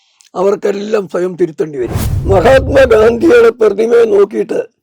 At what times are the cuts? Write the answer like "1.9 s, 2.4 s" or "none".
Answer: 2.1 s

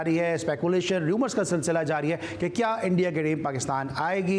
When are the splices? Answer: none

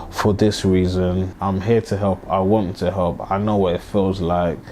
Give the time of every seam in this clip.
1.3 s

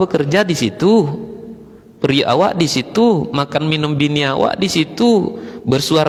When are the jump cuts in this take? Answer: none

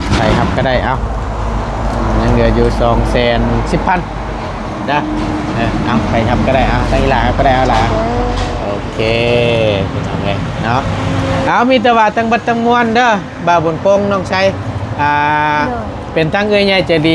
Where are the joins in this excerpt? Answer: none

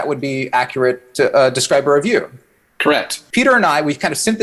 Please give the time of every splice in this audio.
3.2 s

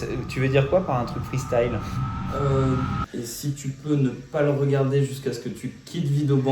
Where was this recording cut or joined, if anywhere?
3.0 s

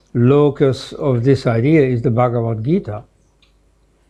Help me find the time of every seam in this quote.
none

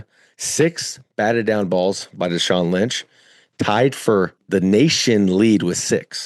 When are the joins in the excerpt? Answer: none

